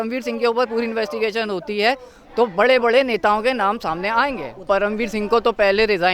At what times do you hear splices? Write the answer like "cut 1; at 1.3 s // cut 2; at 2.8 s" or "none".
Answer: cut 1; at 4.6 s